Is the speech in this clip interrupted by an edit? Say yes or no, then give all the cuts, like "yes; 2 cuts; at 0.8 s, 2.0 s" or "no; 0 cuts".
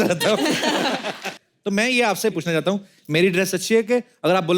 yes; 1 cut; at 1.4 s